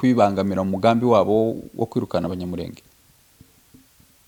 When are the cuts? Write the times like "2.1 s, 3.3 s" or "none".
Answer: none